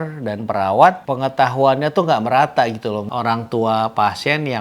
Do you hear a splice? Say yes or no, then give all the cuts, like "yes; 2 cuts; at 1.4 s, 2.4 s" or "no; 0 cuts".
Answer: yes; 2 cuts; at 1.0 s, 3.1 s